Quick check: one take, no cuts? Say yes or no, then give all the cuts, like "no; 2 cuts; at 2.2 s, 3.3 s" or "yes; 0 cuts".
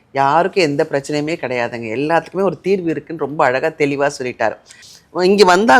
no; 1 cut; at 4.8 s